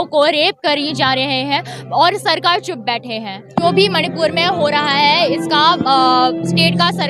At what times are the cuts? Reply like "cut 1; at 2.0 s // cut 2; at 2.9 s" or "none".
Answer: cut 1; at 3.6 s